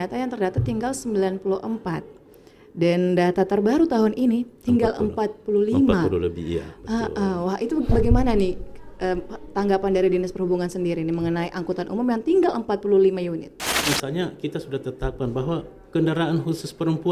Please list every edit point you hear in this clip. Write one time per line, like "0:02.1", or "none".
0:13.7